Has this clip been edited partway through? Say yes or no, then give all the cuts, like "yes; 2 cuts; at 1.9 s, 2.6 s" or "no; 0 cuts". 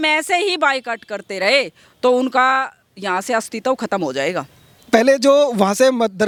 no; 0 cuts